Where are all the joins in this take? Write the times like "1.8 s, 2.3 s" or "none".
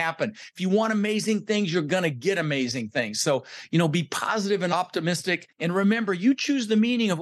5.1 s